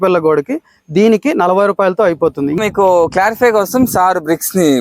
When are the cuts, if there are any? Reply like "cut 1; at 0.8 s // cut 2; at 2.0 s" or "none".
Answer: cut 1; at 2.6 s